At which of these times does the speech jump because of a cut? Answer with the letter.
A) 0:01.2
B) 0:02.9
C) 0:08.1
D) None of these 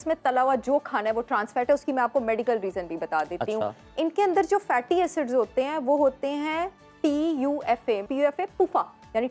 C